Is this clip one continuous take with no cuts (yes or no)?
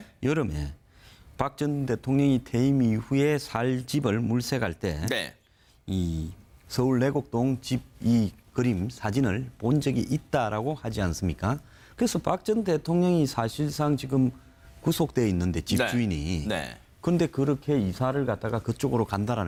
yes